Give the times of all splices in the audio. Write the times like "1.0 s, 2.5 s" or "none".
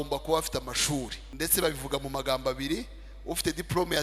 1.2 s